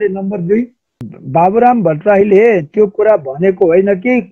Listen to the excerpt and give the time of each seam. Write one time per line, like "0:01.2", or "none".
0:01.1